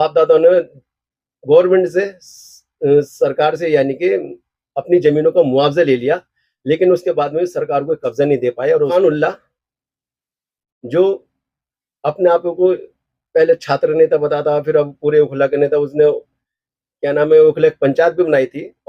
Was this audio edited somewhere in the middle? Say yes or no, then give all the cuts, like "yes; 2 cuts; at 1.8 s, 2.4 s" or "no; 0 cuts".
yes; 1 cut; at 8.9 s